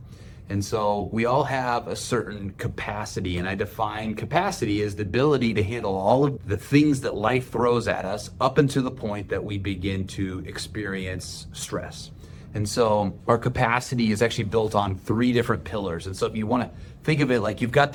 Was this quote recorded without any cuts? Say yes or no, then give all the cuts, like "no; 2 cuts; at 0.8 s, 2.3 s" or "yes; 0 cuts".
yes; 0 cuts